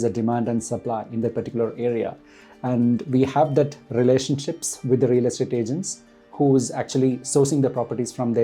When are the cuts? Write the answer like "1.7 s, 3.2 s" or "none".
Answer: none